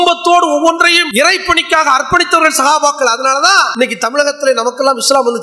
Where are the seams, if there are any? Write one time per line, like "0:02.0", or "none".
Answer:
0:01.0
0:03.7

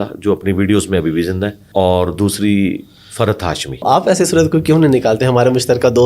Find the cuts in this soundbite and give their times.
0:01.6
0:03.8

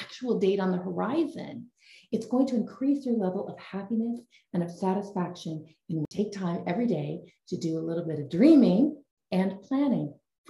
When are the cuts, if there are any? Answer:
0:06.1
0:09.1

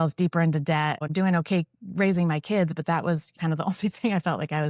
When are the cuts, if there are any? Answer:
0:01.1
0:03.4

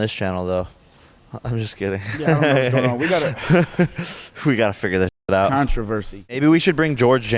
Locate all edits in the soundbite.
0:06.4

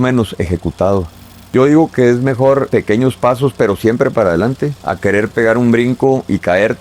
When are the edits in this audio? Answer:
0:01.5
0:02.7
0:04.8

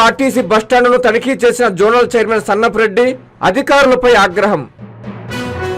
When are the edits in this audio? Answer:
0:04.8

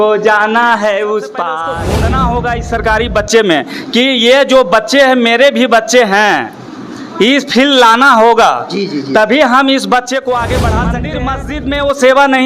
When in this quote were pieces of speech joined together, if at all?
0:01.7
0:11.1

